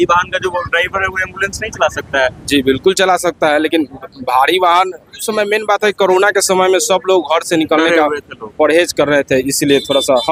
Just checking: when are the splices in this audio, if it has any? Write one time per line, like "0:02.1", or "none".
none